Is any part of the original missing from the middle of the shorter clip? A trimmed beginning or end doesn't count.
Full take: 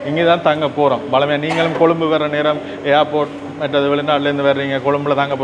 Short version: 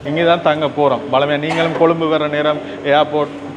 no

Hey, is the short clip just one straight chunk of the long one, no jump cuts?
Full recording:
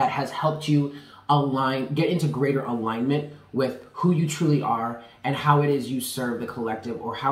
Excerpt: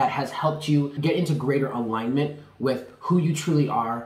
no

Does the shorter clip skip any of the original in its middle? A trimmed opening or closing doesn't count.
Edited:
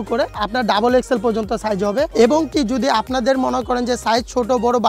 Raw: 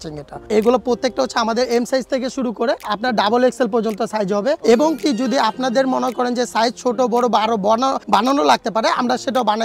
no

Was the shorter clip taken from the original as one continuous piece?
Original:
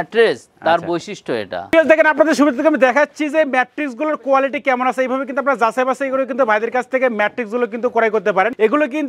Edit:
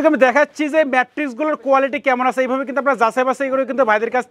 yes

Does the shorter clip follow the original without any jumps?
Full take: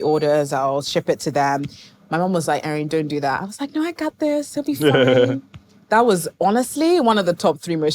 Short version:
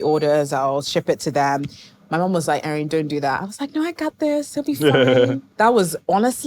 no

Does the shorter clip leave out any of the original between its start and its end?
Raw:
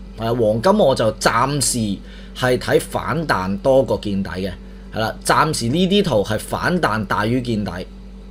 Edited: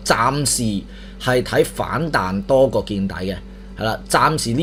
no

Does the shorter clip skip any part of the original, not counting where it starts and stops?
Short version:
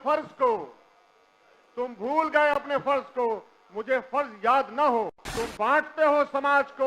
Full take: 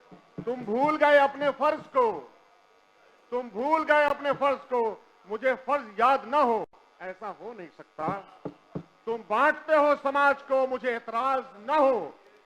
yes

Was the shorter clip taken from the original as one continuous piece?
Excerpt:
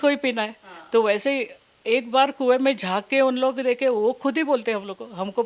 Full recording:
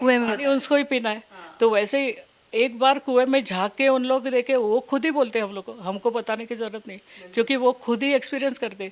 yes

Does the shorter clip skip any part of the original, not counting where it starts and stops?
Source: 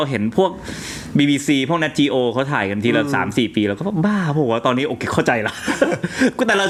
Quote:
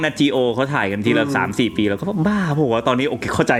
no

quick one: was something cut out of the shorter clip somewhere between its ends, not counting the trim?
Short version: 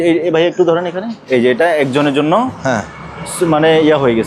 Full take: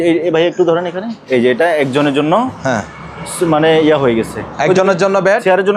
no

